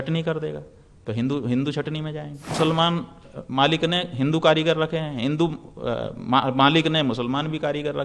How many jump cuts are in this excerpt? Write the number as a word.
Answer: one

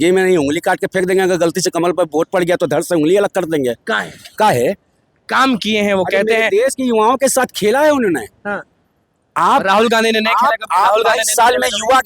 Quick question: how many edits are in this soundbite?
zero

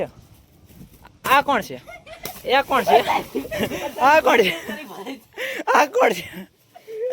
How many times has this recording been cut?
one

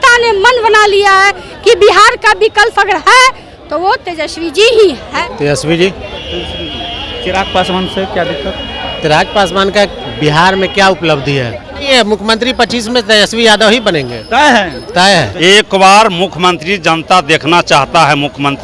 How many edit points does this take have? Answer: three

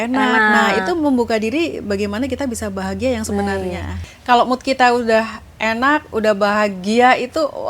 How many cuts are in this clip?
one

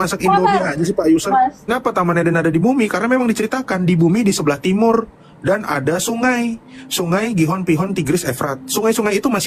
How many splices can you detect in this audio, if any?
one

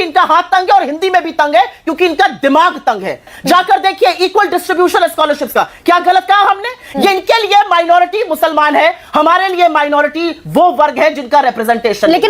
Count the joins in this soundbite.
one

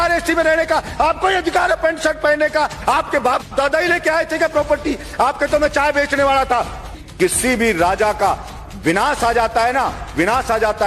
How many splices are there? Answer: one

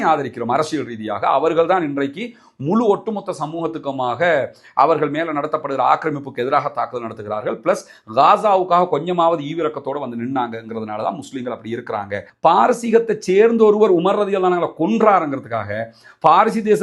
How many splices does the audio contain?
one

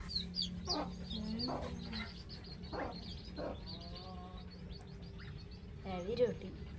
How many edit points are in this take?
zero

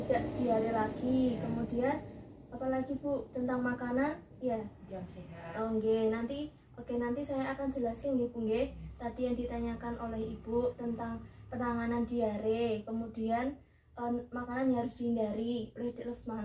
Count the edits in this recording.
zero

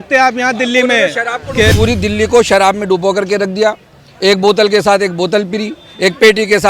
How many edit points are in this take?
one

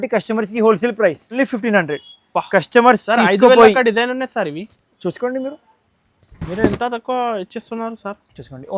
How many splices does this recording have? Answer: one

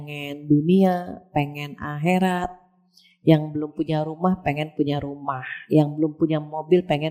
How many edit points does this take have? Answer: zero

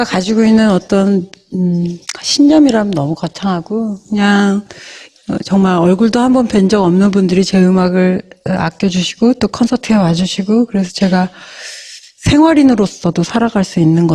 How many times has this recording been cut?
one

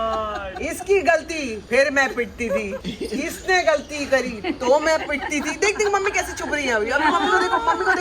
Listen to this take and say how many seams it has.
one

